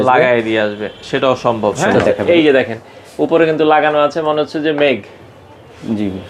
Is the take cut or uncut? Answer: cut